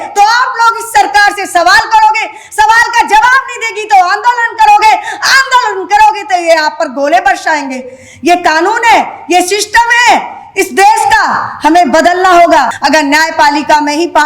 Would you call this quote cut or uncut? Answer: cut